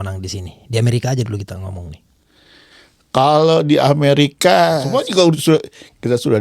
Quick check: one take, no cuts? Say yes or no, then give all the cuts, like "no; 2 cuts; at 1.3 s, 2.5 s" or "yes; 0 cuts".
no; 1 cut; at 4.9 s